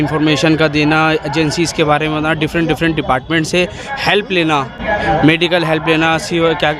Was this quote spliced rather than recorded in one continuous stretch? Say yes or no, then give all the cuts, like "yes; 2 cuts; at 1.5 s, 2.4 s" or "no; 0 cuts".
no; 0 cuts